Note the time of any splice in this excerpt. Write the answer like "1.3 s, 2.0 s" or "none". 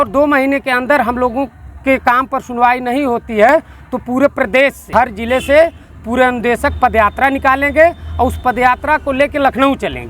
4.9 s